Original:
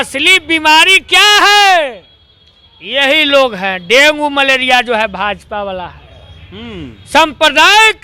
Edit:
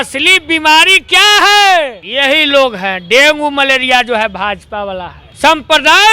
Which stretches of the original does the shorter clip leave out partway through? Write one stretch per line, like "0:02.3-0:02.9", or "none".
0:02.0-0:02.8
0:06.0-0:06.9